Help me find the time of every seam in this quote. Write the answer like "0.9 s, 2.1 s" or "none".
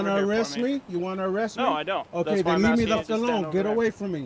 3.0 s